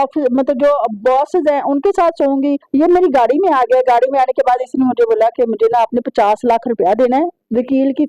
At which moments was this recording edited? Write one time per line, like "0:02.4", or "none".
0:02.6